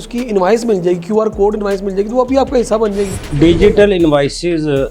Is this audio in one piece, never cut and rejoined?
no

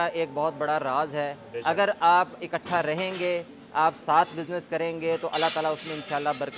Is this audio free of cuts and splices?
yes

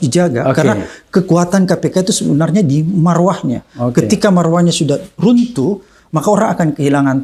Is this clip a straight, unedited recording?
yes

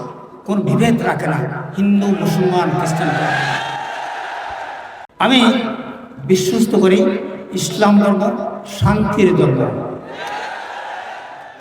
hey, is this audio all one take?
no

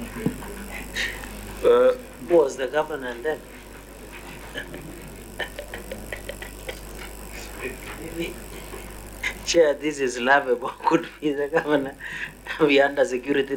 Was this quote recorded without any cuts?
yes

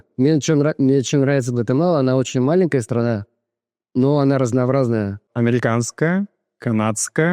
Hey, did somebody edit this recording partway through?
yes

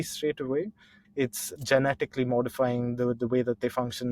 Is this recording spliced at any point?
yes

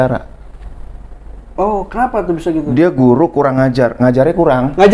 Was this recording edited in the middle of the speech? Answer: no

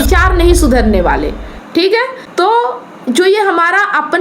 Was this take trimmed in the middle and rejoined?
yes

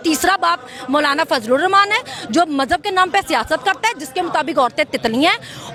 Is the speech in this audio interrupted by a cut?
no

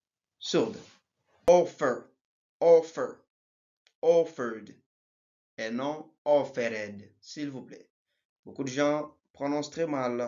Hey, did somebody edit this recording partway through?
yes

